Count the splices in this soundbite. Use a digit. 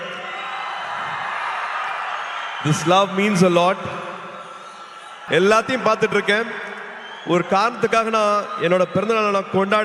1